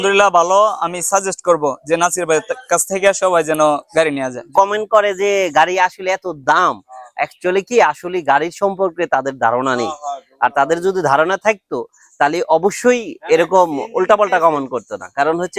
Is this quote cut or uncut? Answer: cut